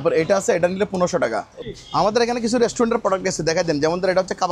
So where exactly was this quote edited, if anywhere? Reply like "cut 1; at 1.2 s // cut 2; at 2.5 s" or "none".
cut 1; at 1.6 s